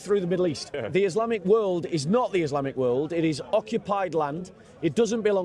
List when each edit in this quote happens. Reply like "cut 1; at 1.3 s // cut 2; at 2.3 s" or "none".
cut 1; at 1.0 s